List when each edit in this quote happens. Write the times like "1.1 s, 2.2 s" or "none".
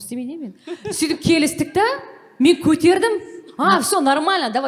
none